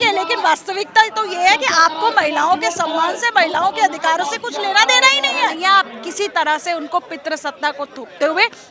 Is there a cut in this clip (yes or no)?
yes